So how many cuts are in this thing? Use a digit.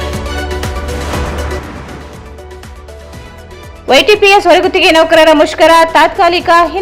1